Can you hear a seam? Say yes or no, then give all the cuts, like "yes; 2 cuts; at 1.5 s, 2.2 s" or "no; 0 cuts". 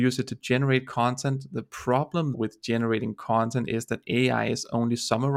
yes; 1 cut; at 2.3 s